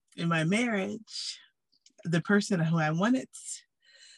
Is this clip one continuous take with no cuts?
yes; 0 cuts

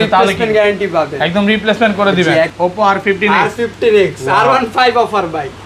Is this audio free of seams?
no; 1 cut; at 2.5 s

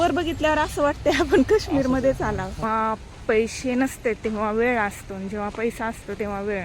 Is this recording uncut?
no; 1 cut; at 2.6 s

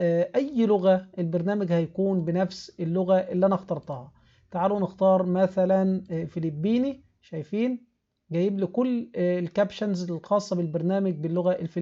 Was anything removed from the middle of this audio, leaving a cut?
no; 0 cuts

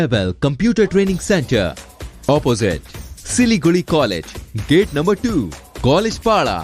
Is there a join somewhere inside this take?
no; 0 cuts

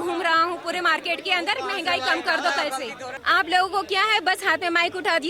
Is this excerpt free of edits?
no; 1 cut; at 3.1 s

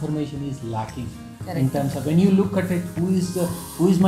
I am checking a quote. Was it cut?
no; 0 cuts

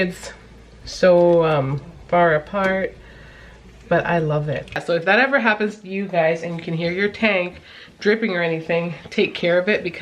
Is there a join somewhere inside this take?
yes; 1 cut; at 4.7 s

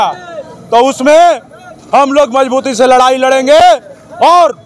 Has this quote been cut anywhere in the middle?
no; 0 cuts

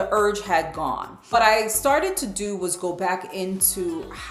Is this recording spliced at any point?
yes; 1 cut; at 1.2 s

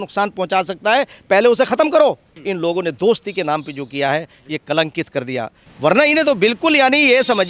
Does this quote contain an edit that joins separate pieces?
yes; 2 cuts; at 2.3 s, 5.6 s

